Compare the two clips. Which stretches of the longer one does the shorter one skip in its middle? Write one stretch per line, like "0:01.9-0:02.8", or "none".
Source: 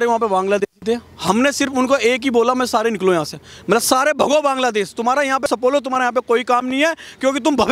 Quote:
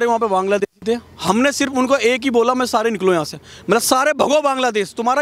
none

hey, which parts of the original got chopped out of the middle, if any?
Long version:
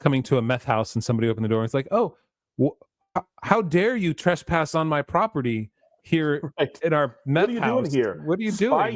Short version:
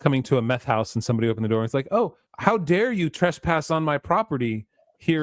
0:02.3-0:03.3

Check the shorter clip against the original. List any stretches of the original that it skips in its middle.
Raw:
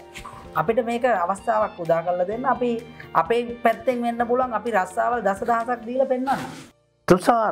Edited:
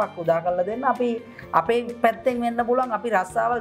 none

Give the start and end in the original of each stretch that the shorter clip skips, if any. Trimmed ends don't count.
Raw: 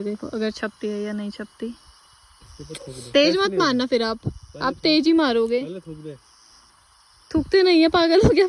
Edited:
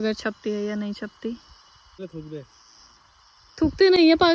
0:02.5-0:05.9

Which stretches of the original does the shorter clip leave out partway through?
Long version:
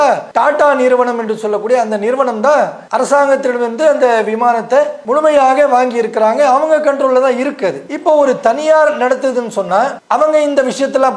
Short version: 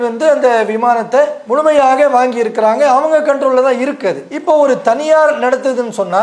none

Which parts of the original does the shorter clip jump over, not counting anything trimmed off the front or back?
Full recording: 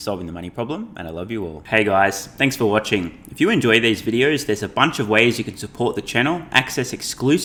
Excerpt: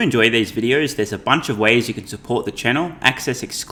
none

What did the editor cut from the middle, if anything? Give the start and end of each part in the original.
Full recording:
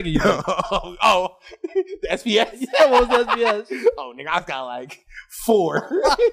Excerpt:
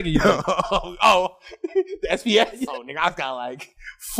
0:02.7-0:04.0

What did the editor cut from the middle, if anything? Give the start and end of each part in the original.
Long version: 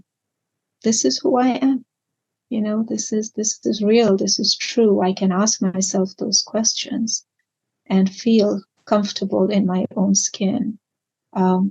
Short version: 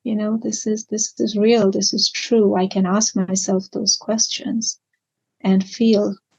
none

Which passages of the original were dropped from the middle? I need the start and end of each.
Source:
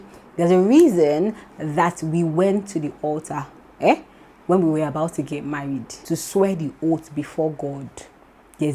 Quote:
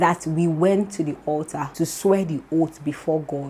0:03.4-0:05.9

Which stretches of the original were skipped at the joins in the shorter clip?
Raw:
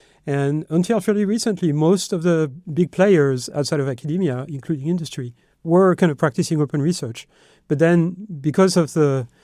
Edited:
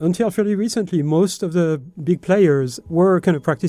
0:03.5-0:05.5

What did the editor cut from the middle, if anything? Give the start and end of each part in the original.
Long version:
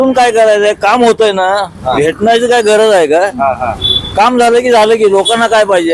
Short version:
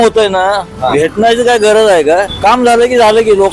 0:03.3-0:04.0

